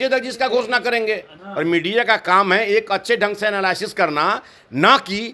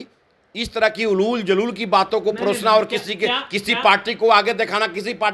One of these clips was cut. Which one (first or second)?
first